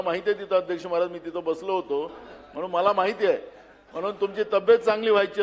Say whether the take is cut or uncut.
uncut